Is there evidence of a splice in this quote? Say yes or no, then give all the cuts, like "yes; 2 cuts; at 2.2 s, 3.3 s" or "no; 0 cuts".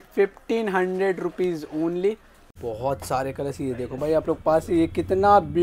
yes; 1 cut; at 2.5 s